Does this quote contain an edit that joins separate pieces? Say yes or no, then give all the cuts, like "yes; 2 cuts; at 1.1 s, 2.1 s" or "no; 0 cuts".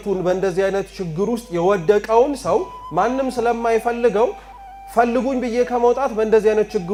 no; 0 cuts